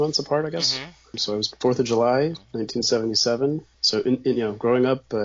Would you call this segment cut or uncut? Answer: cut